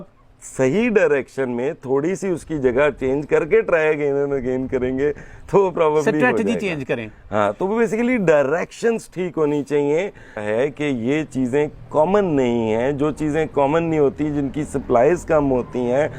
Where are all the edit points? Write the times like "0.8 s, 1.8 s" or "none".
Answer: 10.4 s